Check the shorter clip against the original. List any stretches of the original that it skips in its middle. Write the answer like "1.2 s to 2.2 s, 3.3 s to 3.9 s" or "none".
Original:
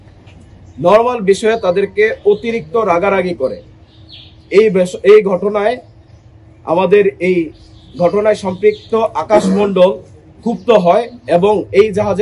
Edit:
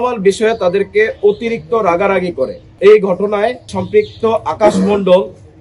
3.7 s to 4.9 s, 6.0 s to 8.5 s